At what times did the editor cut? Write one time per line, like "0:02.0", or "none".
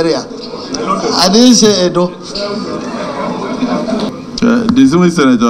0:04.1